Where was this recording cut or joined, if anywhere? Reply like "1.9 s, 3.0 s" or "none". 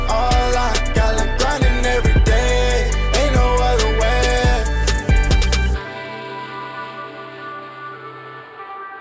none